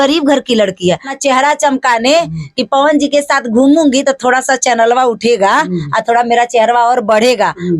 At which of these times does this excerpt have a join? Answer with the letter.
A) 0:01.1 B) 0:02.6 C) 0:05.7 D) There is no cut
A